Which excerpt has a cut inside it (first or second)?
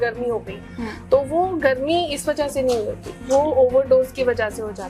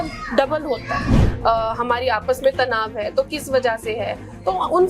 second